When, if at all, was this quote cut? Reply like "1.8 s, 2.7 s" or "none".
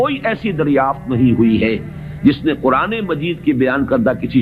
none